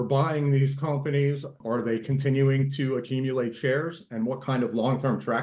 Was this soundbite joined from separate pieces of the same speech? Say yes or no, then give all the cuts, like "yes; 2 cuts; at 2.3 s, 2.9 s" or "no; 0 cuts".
yes; 1 cut; at 1.6 s